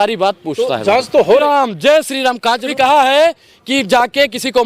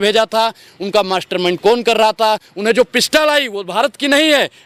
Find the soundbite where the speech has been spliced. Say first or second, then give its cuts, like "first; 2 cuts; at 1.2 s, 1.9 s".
first; 2 cuts; at 1.4 s, 2.7 s